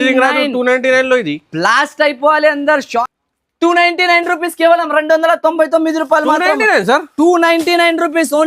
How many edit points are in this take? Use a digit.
1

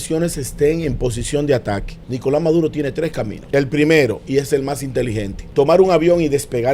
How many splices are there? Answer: 3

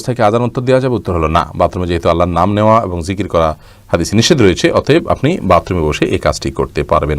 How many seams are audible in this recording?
0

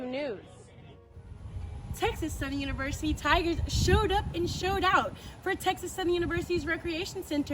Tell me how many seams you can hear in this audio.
1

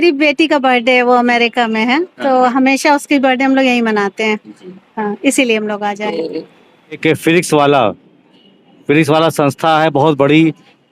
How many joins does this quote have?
1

